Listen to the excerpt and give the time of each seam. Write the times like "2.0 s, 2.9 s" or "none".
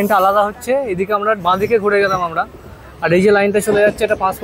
1.4 s

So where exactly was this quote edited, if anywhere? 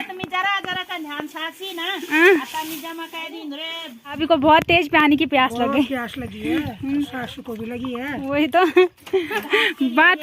4.2 s, 9.4 s

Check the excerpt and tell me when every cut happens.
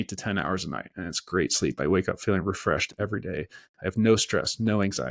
none

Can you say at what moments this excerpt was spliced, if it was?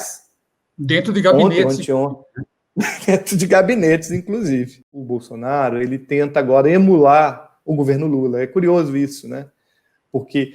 4.9 s

